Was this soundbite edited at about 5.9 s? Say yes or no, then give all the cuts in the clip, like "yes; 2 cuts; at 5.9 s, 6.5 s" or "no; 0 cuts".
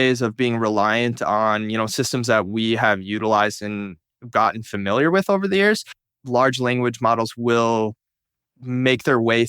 yes; 1 cut; at 5.9 s